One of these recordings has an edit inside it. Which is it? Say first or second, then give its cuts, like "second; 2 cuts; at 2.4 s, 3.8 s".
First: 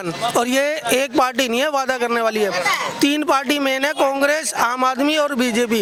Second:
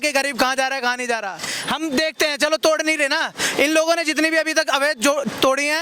second; 1 cut; at 1.5 s